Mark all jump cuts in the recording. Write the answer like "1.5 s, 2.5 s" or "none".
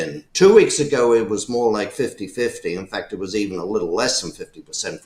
none